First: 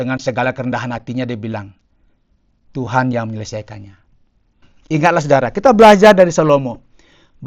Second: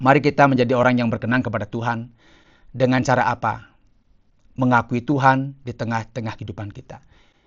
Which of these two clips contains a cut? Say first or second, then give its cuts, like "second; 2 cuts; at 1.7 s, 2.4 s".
first; 1 cut; at 4.7 s